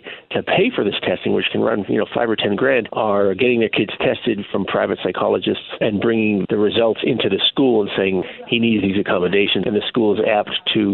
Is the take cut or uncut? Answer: cut